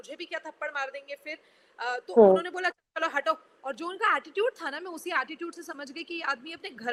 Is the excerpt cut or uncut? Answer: uncut